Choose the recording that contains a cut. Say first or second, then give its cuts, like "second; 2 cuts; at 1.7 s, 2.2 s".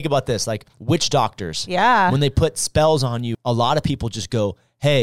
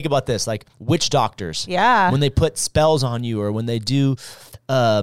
first; 1 cut; at 3.3 s